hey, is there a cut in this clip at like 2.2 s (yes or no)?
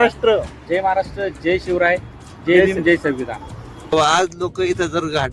no